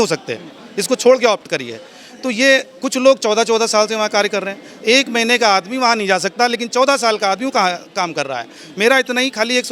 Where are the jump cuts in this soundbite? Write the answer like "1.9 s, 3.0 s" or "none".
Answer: none